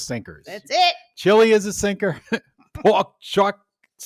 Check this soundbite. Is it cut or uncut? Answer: uncut